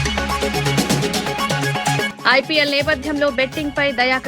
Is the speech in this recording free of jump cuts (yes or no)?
no